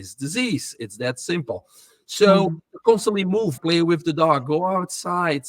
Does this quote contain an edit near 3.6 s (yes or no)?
yes